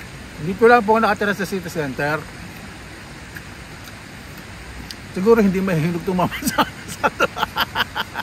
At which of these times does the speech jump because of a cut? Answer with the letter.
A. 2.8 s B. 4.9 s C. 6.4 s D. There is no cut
D